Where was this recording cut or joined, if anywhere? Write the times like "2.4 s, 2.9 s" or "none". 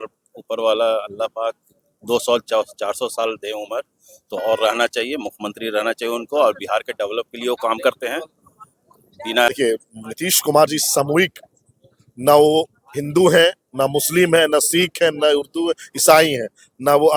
9.5 s